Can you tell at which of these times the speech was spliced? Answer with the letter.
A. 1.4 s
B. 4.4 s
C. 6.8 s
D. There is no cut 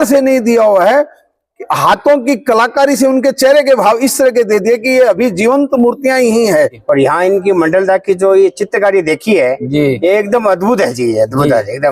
C